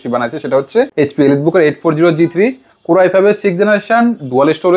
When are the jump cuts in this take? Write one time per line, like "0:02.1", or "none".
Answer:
0:00.9